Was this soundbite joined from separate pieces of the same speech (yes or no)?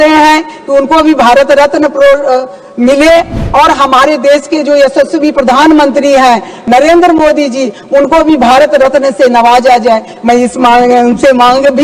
no